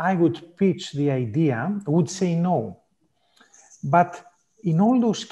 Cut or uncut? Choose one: uncut